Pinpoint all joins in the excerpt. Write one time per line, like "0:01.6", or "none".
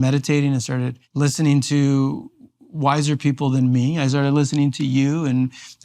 0:01.0